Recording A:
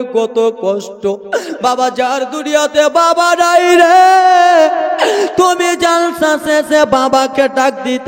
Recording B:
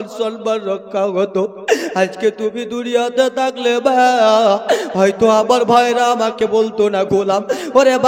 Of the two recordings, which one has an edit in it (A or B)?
A